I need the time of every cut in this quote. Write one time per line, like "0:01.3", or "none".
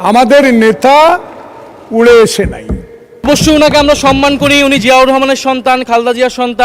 0:03.3